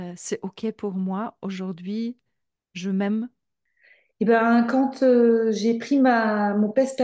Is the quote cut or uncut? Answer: uncut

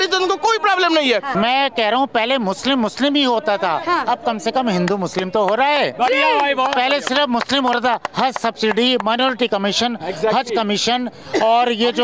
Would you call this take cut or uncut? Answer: cut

